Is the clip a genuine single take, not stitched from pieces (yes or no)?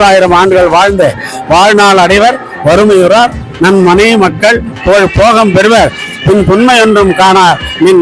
yes